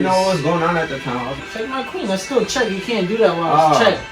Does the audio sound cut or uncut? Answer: cut